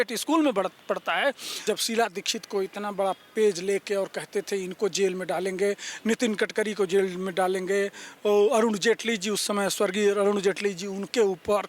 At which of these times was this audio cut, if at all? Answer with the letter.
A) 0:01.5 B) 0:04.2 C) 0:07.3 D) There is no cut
A